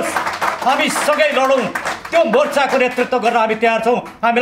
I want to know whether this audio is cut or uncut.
uncut